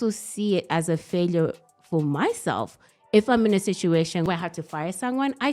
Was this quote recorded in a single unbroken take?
no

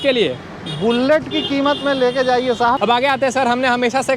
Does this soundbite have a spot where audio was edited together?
yes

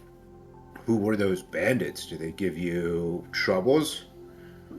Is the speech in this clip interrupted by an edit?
no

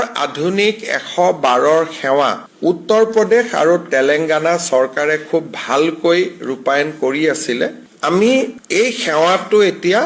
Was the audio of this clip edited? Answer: no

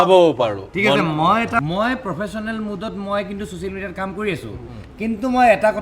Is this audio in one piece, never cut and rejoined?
no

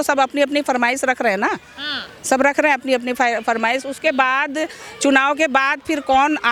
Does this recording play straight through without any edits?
yes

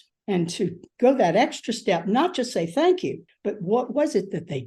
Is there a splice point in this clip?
yes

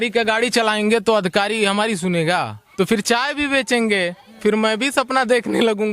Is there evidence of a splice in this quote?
yes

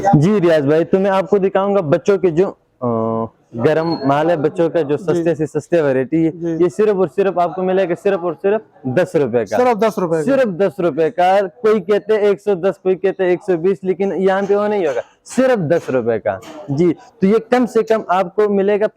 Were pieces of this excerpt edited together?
no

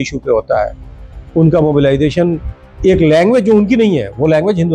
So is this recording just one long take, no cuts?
yes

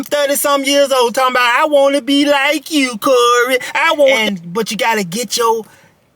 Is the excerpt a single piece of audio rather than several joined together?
no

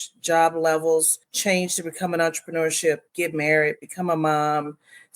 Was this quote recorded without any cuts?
no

